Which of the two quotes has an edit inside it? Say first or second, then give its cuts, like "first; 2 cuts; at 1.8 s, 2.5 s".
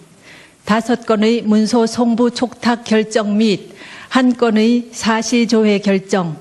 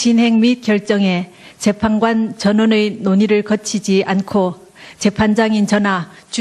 second; 1 cut; at 3.7 s